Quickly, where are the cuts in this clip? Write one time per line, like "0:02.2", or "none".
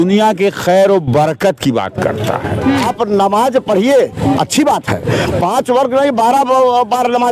0:02.9